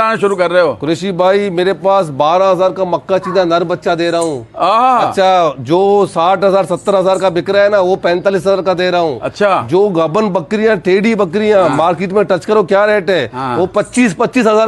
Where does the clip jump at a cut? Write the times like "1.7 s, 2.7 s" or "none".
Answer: none